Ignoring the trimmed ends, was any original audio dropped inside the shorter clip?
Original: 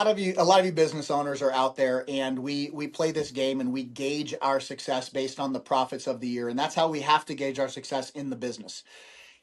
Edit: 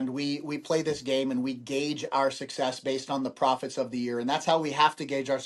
no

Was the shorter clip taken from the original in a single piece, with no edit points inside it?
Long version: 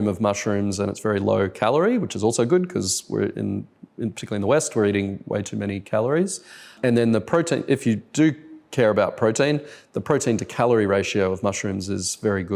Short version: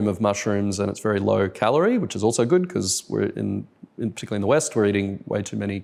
yes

